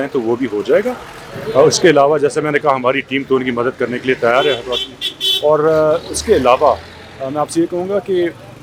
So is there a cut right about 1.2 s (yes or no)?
no